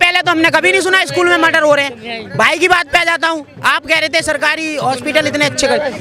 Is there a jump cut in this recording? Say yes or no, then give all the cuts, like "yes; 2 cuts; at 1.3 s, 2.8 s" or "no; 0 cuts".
no; 0 cuts